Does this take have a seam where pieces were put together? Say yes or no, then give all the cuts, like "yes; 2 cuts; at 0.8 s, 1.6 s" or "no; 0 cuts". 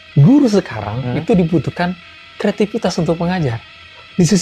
no; 0 cuts